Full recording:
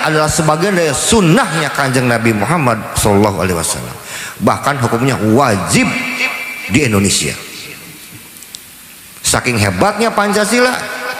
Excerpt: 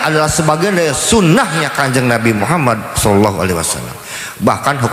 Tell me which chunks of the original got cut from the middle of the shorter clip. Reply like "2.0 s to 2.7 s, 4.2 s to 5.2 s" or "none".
none